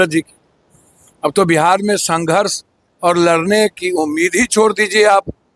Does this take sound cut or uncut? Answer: uncut